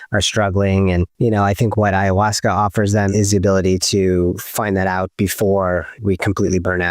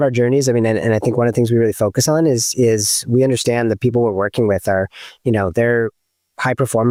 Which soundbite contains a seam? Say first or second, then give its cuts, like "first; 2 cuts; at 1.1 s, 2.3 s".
first; 3 cuts; at 1.1 s, 3.1 s, 6.0 s